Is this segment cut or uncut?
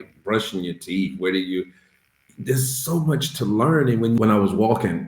cut